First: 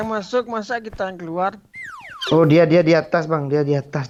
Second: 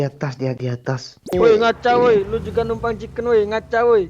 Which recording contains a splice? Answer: second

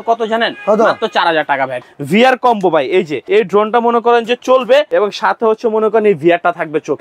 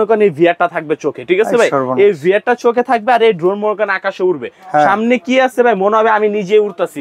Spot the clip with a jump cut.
first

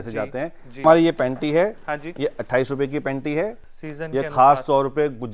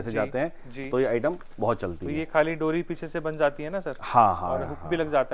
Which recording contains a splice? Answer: first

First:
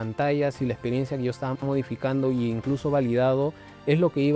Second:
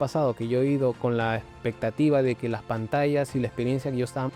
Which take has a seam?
second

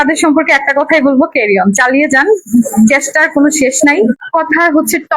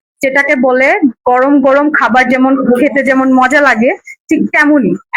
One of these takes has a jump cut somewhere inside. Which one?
first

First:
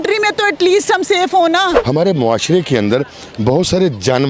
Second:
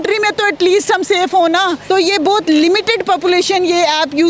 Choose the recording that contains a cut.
first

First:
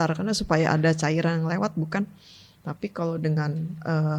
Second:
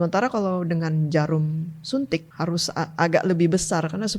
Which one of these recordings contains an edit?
second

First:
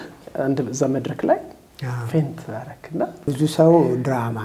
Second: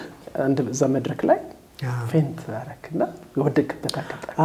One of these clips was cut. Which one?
first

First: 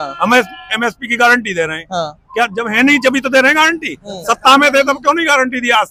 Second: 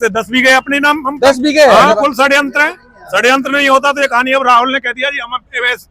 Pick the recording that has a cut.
second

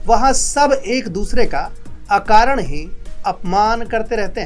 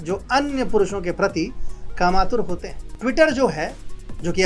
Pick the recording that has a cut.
second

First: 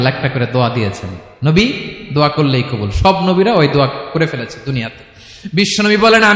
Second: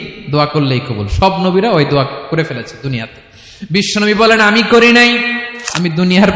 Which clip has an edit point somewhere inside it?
second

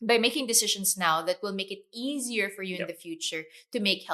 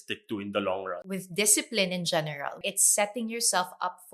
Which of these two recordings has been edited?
second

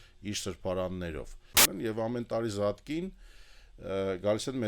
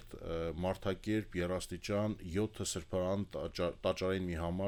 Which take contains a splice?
first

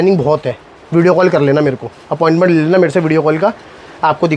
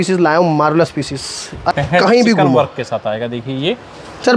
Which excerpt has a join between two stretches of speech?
second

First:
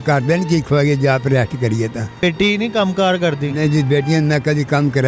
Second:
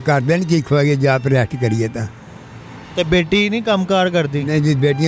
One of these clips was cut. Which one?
first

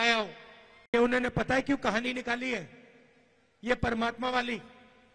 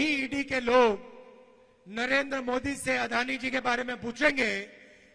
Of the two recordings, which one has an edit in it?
first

